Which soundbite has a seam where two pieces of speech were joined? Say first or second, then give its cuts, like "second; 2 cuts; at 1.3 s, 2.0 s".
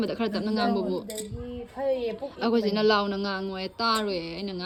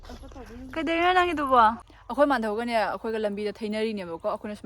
second; 1 cut; at 1.9 s